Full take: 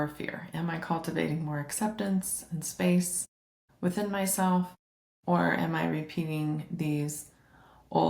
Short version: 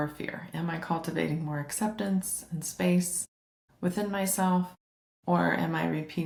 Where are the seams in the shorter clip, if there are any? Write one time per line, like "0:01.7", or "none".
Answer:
none